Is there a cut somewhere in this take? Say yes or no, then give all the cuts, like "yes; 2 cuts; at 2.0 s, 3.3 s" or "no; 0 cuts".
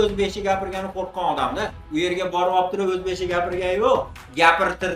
no; 0 cuts